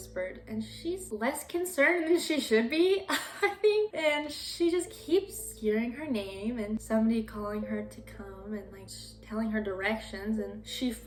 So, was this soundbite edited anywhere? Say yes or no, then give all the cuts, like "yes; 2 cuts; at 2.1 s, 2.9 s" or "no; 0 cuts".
no; 0 cuts